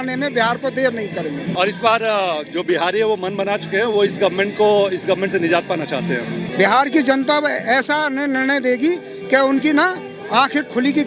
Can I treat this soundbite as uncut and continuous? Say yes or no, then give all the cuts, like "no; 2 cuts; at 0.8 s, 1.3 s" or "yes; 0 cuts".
no; 2 cuts; at 1.5 s, 6.5 s